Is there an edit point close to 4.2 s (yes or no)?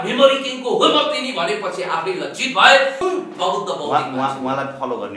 no